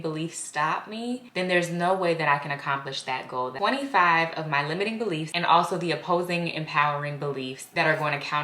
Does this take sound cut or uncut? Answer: cut